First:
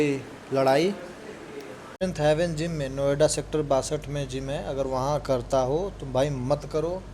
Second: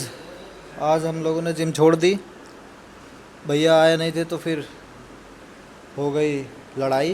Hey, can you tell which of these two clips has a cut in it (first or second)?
first